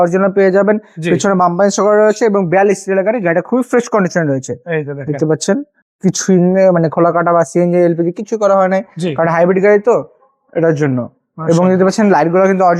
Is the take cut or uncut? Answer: uncut